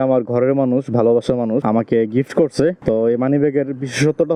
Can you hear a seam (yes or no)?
no